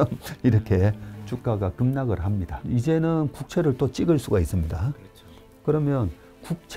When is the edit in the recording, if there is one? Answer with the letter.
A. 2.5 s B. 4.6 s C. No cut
A